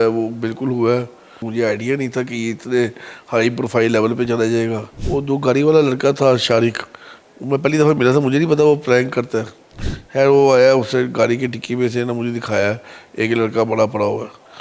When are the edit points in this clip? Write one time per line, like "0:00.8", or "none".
0:01.4
0:04.9

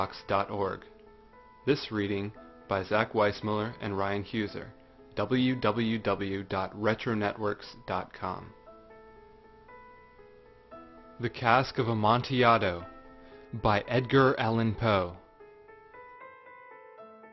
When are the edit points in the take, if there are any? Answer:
0:06.4

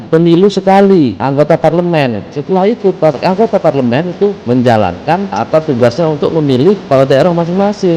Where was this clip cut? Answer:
0:01.2
0:04.4
0:05.3

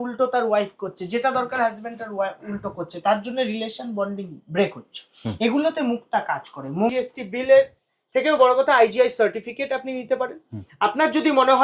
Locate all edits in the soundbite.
0:06.9

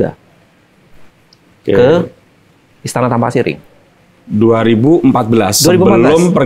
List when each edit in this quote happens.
none

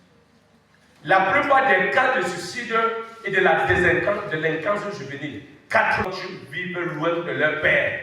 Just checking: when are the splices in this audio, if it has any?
0:06.1

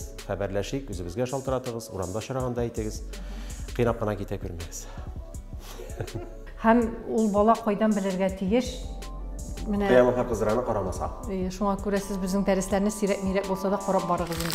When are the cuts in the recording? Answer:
0:06.4

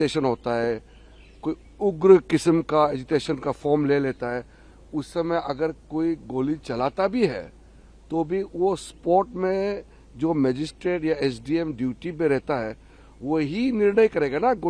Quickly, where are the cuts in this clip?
none

